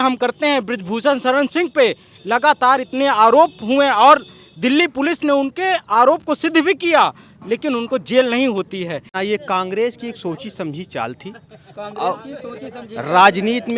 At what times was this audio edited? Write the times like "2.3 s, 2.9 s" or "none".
9.2 s